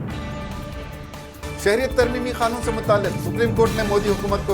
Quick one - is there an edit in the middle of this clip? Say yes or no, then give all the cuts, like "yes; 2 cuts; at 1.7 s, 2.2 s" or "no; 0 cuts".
yes; 1 cut; at 1.4 s